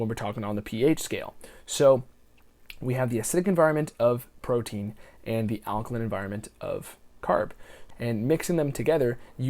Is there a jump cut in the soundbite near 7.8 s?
yes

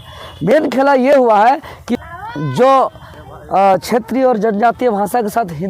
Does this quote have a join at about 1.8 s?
yes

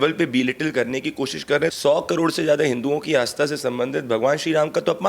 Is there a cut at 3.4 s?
no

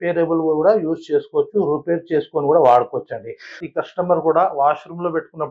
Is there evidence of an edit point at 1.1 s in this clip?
no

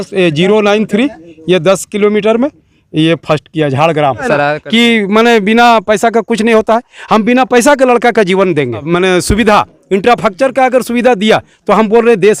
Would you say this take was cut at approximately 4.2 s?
yes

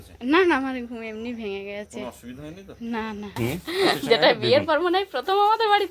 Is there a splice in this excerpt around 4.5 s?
no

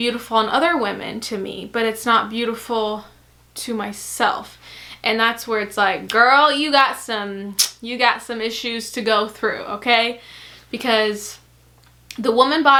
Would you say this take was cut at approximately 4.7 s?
no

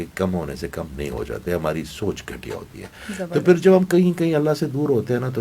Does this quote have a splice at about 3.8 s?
no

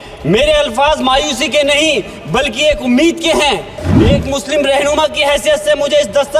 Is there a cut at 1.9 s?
no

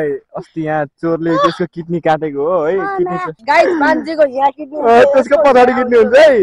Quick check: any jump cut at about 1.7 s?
no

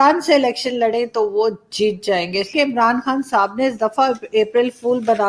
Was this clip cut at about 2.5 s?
yes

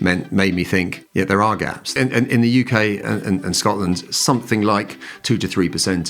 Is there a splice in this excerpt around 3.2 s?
no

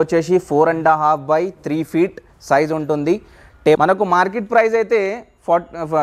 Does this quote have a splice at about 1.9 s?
no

